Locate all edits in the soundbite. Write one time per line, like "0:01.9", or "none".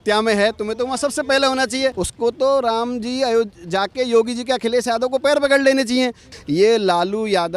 0:02.0
0:06.3